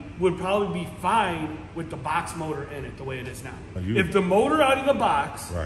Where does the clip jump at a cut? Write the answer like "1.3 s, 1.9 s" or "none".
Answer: 3.7 s